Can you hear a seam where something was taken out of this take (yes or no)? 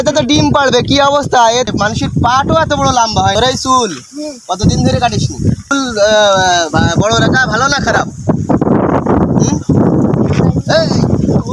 yes